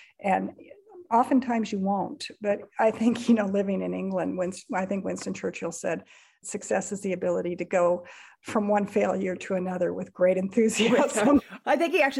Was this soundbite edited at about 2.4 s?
no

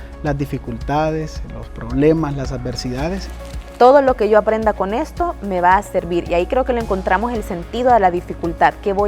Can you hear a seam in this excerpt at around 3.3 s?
yes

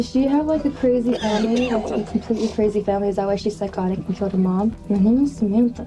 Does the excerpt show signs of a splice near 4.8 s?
yes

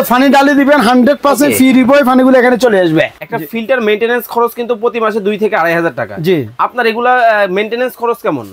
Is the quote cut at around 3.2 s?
yes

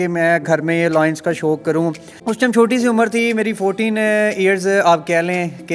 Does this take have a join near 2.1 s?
yes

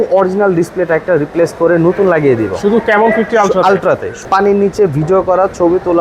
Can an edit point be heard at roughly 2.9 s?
no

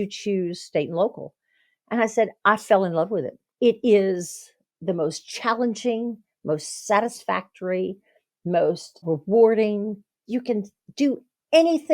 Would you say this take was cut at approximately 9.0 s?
yes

